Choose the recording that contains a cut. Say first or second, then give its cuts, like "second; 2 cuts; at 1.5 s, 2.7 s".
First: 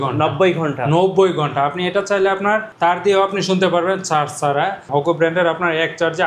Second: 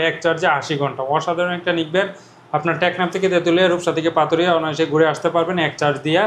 first; 2 cuts; at 2.7 s, 4.8 s